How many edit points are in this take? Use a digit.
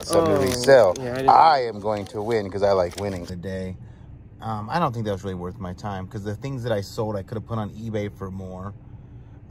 1